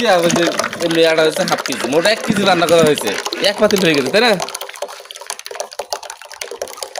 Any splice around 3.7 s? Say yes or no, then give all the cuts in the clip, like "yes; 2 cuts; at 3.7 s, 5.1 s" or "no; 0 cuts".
no; 0 cuts